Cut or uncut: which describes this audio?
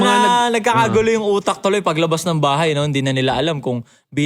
uncut